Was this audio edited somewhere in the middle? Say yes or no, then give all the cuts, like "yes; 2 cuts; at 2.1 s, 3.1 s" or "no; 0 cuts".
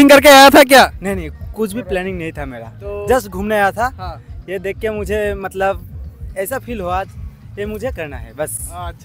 no; 0 cuts